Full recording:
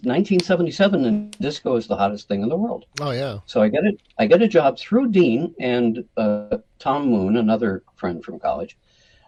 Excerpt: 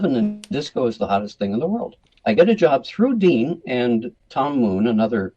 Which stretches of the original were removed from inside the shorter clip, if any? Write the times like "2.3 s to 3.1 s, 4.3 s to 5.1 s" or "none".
3.0 s to 4.0 s, 6.1 s to 6.6 s